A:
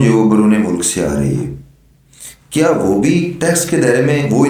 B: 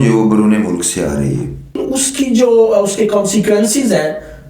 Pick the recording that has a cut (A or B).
B